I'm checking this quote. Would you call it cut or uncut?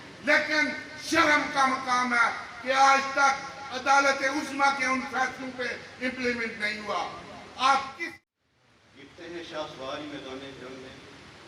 cut